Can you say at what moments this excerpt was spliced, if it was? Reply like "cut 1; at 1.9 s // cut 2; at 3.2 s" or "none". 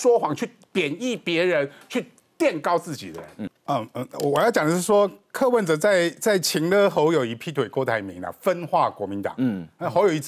none